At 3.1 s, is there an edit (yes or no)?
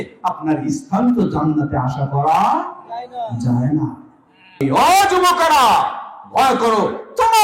no